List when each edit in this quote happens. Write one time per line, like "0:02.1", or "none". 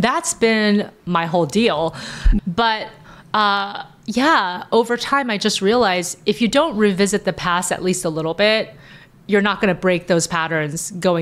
0:02.4

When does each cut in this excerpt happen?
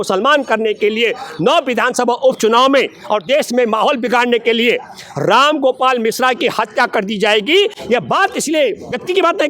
none

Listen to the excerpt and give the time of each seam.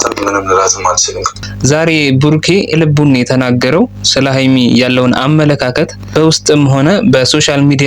0:01.4
0:02.7
0:06.0

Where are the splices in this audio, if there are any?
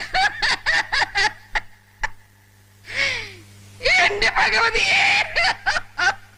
none

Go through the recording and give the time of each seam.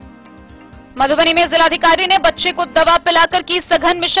0:00.9

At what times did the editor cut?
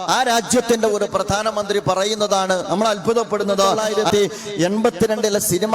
0:03.8

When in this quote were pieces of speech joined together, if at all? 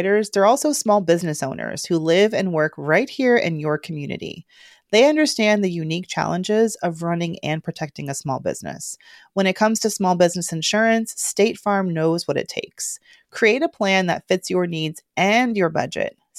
none

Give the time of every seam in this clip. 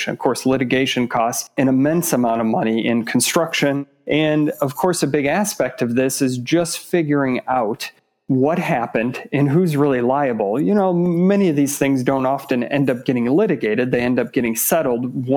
0:01.5
0:03.8

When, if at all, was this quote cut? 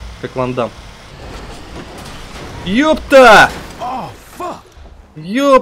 0:01.1
0:04.7

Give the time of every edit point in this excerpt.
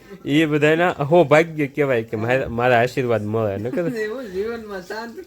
none

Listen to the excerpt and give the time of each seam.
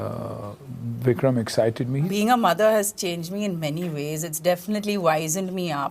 0:02.1

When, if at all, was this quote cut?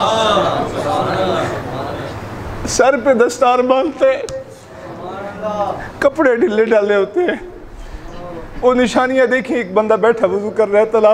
none

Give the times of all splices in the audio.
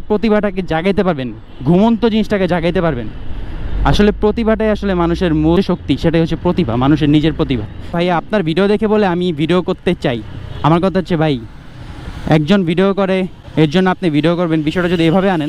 0:05.6
0:07.9
0:13.4

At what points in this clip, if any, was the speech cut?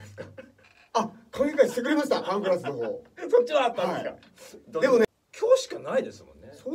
0:05.1

